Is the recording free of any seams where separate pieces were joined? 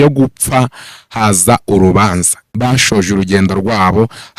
no; 1 cut; at 2.4 s

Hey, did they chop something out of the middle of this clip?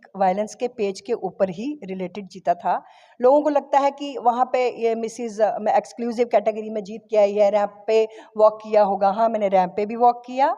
no; 0 cuts

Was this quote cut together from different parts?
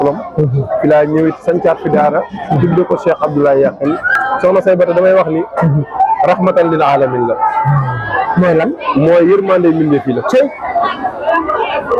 yes; 1 cut; at 4.1 s

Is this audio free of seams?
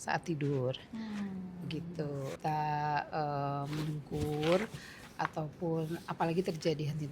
no; 1 cut; at 2.3 s

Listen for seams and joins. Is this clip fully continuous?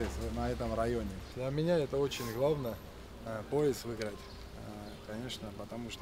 no; 1 cut; at 1.3 s

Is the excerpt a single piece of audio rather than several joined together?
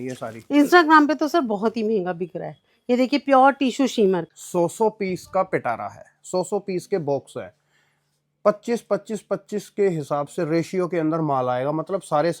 no; 1 cut; at 4.3 s

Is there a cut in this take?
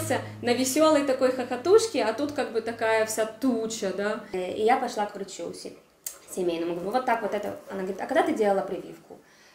yes; 1 cut; at 4.3 s

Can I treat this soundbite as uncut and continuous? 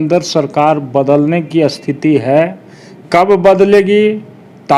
yes; 0 cuts

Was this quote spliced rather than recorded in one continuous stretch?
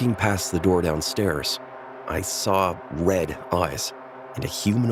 no; 0 cuts

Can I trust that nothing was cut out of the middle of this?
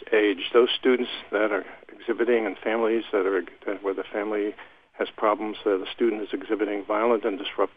yes; 0 cuts

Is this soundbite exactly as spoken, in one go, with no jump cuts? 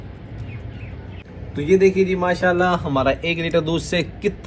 no; 1 cut; at 1.2 s

